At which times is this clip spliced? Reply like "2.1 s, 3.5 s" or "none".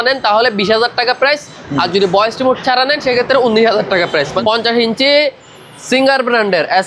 4.4 s